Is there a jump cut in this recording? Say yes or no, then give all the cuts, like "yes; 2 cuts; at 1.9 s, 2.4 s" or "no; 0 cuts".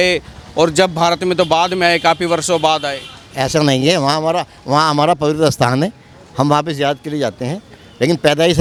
no; 0 cuts